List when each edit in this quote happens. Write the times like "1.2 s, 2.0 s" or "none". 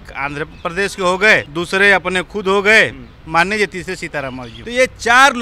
1.5 s, 4.5 s